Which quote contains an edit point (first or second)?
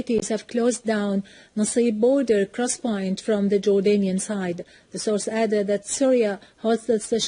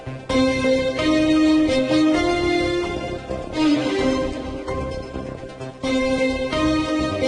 second